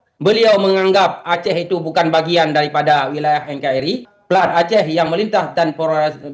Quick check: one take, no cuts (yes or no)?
no